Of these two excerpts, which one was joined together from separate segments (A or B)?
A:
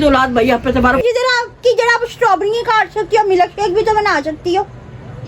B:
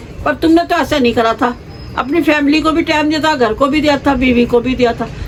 A